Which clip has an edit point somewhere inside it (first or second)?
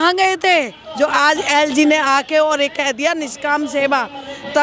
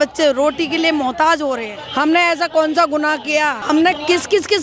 second